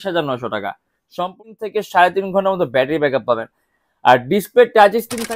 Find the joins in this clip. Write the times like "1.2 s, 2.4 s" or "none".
1.2 s

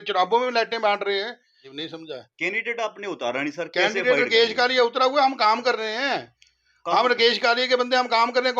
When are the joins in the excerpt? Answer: 1.7 s

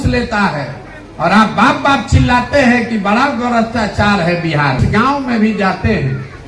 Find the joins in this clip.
4.9 s

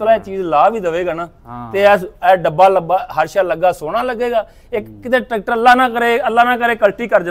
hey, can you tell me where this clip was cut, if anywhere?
none

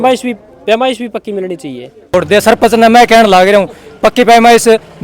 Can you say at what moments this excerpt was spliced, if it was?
2.1 s

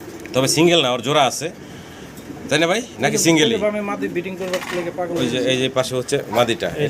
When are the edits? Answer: none

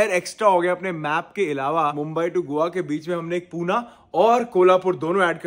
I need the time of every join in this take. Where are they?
2.0 s

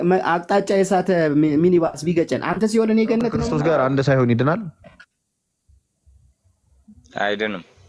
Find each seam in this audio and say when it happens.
3.5 s

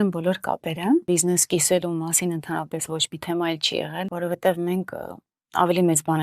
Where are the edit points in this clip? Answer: 1.0 s, 4.1 s

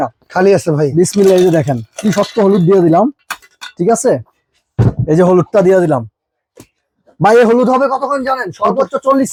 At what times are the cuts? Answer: none

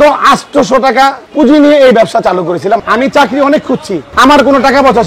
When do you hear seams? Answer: 1.2 s, 2.8 s, 4.0 s

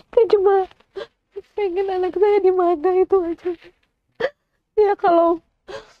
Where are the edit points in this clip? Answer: none

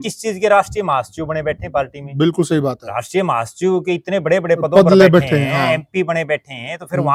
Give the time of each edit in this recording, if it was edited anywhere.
none

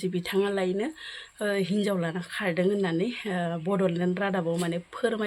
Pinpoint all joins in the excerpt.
none

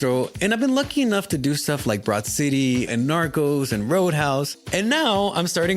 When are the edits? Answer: 4.6 s

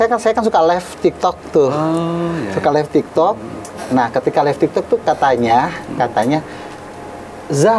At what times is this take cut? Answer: none

